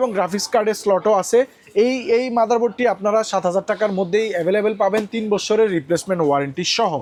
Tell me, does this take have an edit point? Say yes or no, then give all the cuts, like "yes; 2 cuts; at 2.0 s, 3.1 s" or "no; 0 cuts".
no; 0 cuts